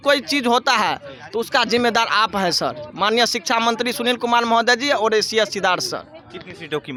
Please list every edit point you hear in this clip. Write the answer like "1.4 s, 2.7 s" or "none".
none